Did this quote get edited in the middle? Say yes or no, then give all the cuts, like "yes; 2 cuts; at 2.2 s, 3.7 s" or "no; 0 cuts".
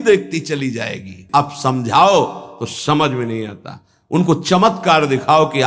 yes; 1 cut; at 1.2 s